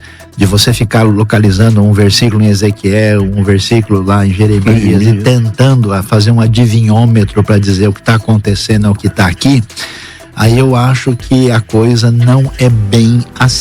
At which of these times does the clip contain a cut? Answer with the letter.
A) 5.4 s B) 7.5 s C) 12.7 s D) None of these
D